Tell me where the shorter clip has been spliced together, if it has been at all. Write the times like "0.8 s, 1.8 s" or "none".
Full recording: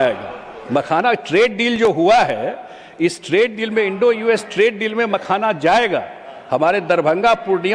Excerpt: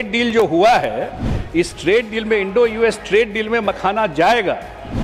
none